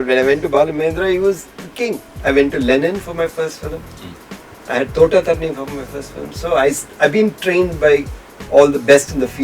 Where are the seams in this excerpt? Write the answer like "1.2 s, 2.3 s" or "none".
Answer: 2.1 s